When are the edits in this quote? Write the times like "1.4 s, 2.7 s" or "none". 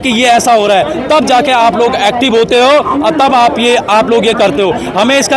none